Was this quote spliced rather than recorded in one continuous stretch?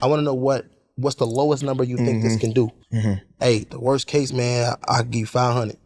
yes; 2 cuts; at 2.8 s, 3.7 s

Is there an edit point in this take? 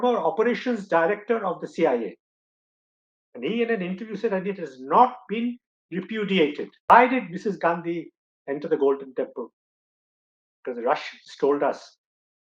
yes; 1 cut; at 6.9 s

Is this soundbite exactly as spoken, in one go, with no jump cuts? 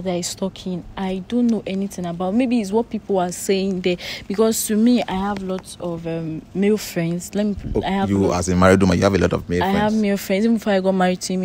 yes; 0 cuts

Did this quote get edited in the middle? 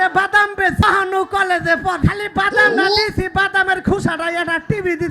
yes; 2 cuts; at 0.8 s, 2.0 s

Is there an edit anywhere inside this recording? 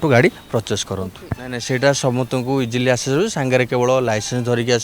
no; 0 cuts

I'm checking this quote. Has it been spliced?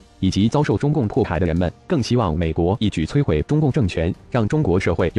yes; 1 cut; at 1.3 s

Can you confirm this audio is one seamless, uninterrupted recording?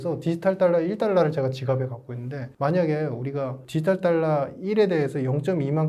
yes; 0 cuts

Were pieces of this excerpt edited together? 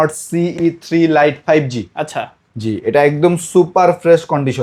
no; 0 cuts

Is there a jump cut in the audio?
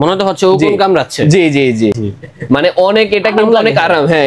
no; 0 cuts

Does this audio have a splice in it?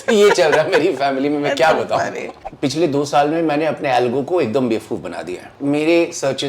yes; 2 cuts; at 2.4 s, 5.5 s

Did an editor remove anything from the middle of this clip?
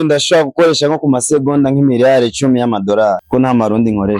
yes; 1 cut; at 3.2 s

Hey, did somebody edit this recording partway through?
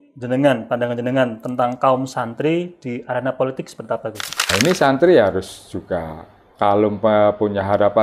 yes; 1 cut; at 4.5 s

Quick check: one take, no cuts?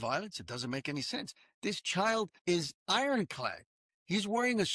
no; 1 cut; at 2.4 s

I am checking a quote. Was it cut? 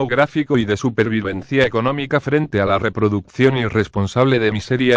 yes; 1 cut; at 3.4 s

